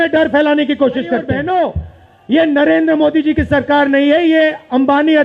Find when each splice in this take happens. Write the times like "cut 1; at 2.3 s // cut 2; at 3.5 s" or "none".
cut 1; at 1.3 s